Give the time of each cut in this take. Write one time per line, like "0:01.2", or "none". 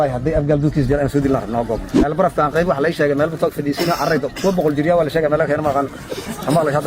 0:02.1

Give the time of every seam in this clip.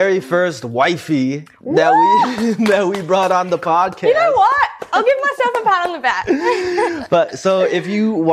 none

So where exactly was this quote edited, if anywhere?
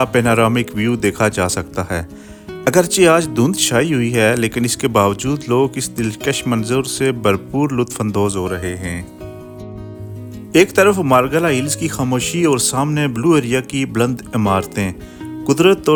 none

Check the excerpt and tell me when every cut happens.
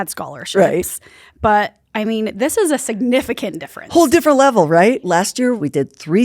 0:05.0

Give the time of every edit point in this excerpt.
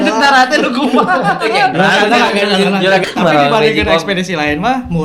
0:03.0

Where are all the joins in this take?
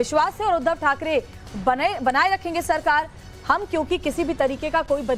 0:04.0

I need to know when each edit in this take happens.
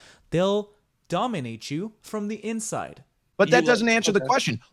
none

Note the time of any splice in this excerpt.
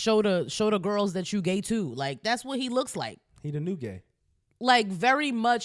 none

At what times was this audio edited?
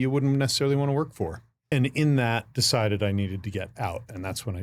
0:01.6

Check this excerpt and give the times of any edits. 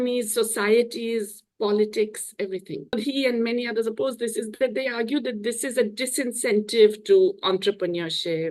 0:02.9

